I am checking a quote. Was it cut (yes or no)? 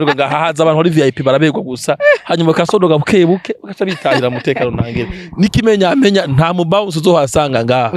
no